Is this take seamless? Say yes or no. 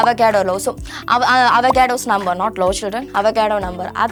yes